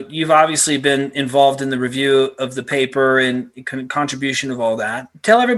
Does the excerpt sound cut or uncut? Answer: uncut